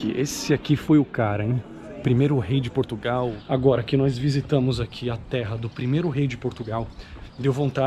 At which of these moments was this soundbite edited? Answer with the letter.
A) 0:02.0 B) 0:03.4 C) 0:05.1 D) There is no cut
B